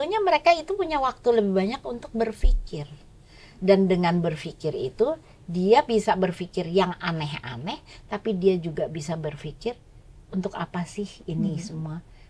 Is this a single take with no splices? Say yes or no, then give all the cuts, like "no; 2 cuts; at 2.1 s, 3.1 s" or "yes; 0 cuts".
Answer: yes; 0 cuts